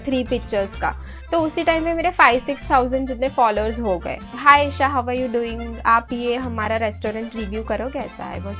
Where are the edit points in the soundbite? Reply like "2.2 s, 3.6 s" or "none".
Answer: 1.1 s, 4.3 s